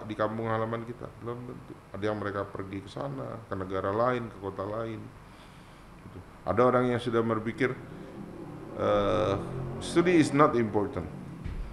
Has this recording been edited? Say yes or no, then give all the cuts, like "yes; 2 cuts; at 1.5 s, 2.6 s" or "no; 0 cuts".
no; 0 cuts